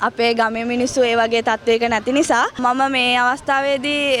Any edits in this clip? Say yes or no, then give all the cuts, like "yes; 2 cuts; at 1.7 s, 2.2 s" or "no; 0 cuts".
no; 0 cuts